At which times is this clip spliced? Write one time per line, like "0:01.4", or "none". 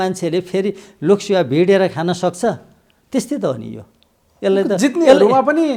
none